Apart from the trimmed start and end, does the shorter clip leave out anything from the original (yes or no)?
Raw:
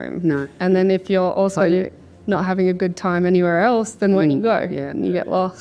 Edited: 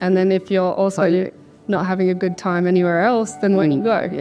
no